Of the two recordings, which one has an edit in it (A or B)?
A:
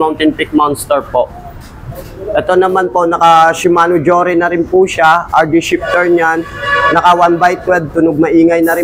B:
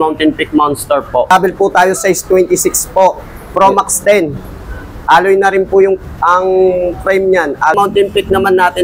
B